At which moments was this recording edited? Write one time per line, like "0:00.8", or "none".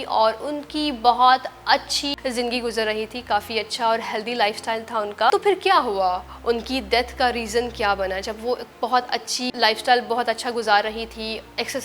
0:02.2
0:05.3
0:09.5